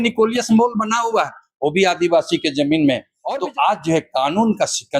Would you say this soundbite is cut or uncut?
cut